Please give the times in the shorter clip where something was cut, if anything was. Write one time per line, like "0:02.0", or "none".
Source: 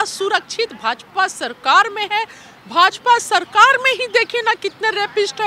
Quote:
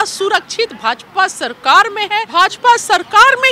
0:02.3